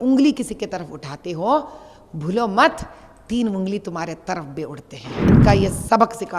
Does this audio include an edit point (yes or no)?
yes